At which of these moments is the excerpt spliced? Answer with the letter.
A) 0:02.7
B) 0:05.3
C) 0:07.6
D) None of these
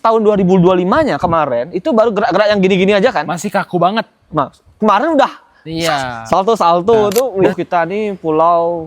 C